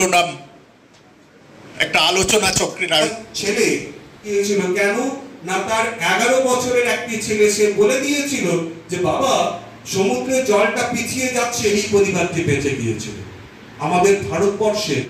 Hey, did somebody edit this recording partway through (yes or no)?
yes